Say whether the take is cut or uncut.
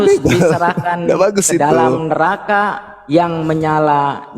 uncut